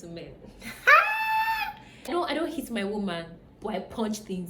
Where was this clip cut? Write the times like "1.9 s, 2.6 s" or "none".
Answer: 2.1 s